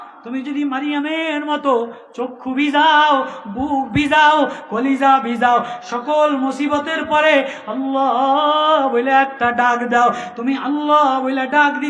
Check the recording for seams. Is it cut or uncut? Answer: uncut